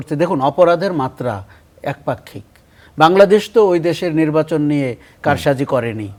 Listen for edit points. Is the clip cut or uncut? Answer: uncut